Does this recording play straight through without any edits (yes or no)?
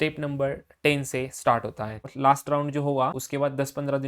no